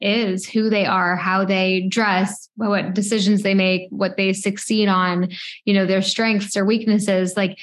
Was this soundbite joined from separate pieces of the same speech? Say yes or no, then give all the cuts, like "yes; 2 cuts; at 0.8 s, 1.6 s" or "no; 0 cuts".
no; 0 cuts